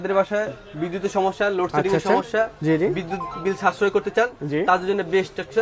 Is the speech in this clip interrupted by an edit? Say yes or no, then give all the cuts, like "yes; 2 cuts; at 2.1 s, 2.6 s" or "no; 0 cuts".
no; 0 cuts